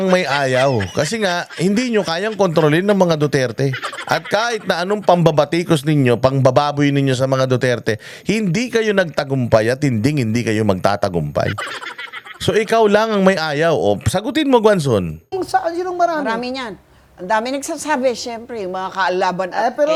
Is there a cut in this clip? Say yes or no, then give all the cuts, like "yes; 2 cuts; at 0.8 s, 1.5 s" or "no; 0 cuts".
no; 0 cuts